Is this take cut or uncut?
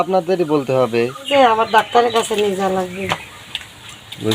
cut